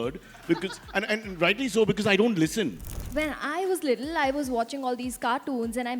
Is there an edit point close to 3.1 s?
yes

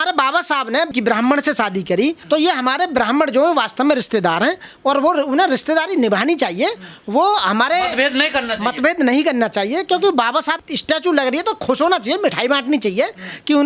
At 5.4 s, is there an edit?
no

